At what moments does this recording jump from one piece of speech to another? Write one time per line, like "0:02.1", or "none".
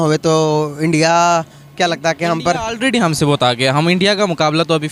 none